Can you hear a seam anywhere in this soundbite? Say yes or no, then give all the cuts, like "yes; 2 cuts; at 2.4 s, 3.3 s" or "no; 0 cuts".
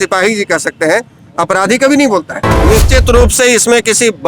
yes; 1 cut; at 2.5 s